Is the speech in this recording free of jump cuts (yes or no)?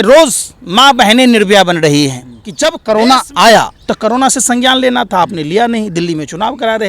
no